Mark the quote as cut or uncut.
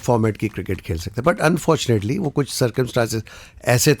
uncut